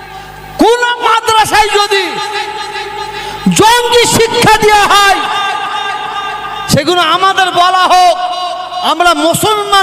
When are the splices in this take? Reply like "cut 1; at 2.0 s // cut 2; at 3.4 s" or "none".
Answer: none